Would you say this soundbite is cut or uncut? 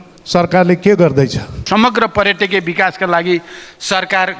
cut